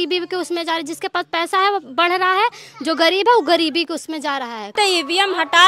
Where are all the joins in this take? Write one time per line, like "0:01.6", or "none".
0:04.7